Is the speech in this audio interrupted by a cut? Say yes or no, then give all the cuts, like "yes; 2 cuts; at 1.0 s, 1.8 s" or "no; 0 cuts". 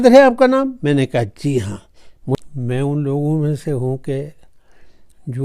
yes; 1 cut; at 2.3 s